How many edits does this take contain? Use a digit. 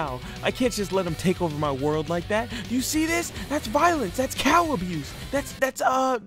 0